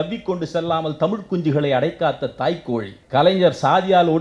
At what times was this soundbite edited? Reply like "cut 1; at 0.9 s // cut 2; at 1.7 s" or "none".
cut 1; at 3.0 s